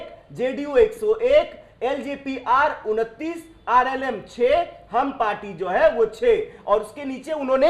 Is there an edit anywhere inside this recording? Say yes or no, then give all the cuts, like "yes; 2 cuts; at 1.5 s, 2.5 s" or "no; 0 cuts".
no; 0 cuts